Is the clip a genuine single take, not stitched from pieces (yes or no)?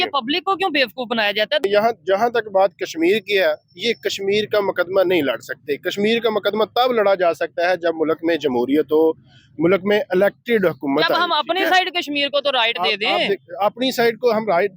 no